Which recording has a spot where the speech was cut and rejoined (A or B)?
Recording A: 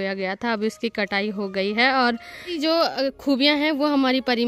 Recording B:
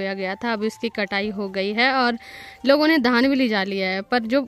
A